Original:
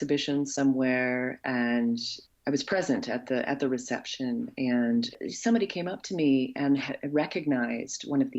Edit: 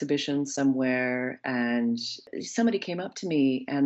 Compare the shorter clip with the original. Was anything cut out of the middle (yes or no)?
yes